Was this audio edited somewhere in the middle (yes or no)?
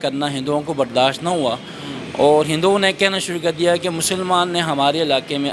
no